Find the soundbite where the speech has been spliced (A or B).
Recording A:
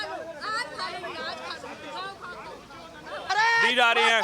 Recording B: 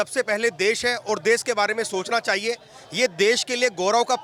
A